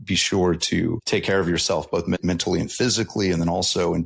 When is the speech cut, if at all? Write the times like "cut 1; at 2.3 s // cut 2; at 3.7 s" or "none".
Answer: cut 1; at 1.0 s // cut 2; at 2.2 s